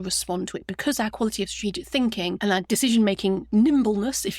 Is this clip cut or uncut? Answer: cut